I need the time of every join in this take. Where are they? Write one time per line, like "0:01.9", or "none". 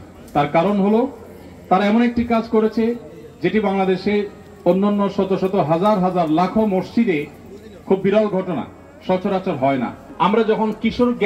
0:10.0